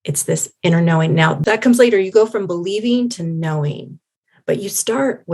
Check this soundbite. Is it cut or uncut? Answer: cut